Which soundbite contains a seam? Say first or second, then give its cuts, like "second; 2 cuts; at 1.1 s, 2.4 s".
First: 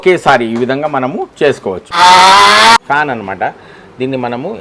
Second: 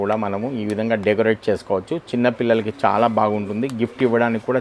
first; 2 cuts; at 1.9 s, 2.8 s